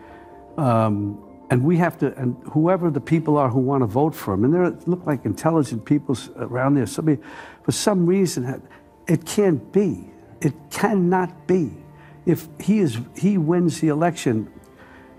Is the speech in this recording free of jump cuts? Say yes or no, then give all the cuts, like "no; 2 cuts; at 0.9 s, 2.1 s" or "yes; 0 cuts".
yes; 0 cuts